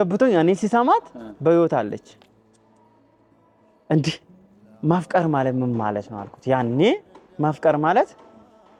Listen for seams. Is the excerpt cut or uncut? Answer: uncut